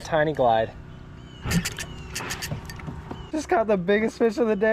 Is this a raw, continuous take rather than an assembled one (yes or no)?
no